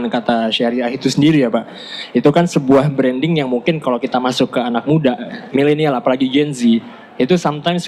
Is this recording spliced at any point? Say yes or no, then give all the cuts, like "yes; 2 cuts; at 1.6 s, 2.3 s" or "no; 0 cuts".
no; 0 cuts